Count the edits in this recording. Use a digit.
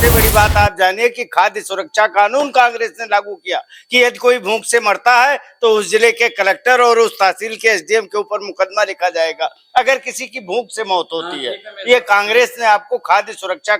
0